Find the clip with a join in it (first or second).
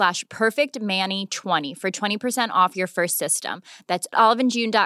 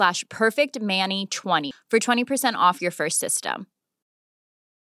second